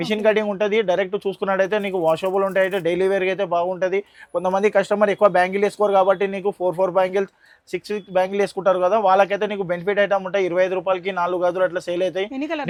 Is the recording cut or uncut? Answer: uncut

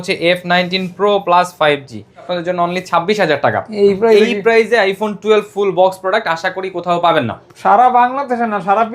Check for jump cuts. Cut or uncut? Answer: cut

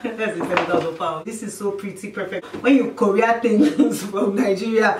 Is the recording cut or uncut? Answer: cut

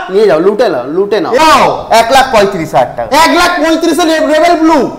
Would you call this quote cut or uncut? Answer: cut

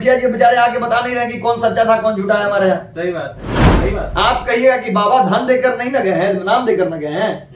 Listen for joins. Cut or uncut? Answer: cut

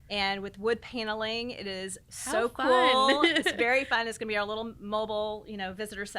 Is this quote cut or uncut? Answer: uncut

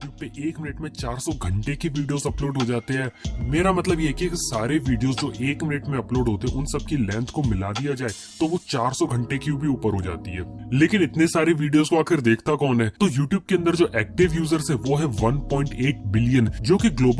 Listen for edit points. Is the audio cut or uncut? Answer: uncut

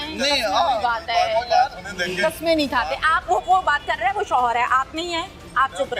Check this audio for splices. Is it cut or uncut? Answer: uncut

